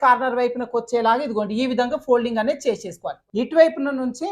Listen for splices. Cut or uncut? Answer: cut